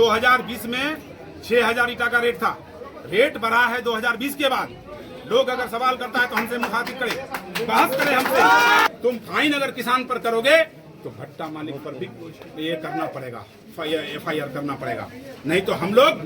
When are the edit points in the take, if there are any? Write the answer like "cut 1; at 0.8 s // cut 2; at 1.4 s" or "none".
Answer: cut 1; at 8.9 s

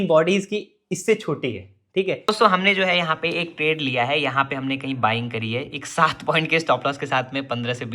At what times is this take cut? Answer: cut 1; at 2.2 s

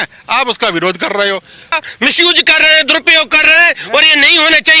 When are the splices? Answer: cut 1; at 1.8 s

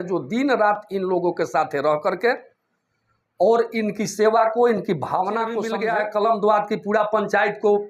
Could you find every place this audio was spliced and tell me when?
cut 1; at 5.7 s

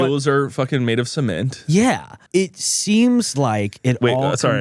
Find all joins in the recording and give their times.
cut 1; at 2.1 s

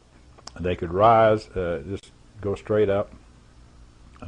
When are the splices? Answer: none

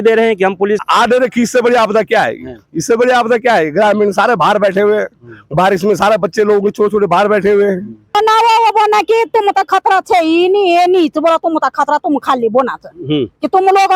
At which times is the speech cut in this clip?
cut 1; at 0.8 s // cut 2; at 8.2 s

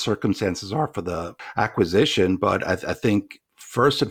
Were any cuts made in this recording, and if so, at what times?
cut 1; at 1.4 s

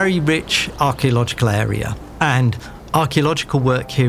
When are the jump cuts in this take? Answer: cut 1; at 2.0 s

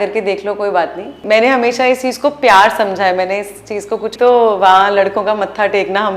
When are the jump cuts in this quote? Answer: cut 1; at 1.2 s // cut 2; at 4.1 s

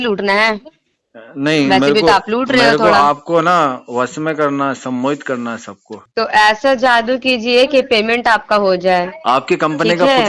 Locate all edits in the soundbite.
cut 1; at 6.0 s

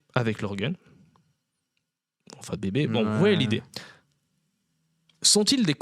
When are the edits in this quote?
none

